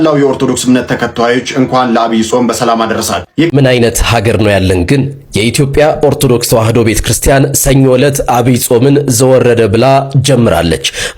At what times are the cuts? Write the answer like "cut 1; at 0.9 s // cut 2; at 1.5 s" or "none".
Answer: cut 1; at 3.5 s